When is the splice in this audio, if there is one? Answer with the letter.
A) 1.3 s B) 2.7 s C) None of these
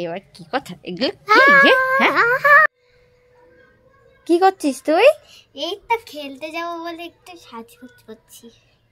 B